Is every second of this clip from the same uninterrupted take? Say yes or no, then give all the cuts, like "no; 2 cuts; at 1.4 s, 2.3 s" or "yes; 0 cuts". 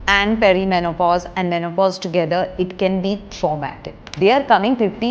no; 1 cut; at 4.0 s